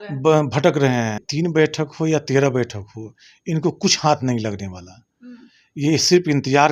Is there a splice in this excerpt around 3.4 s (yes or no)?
no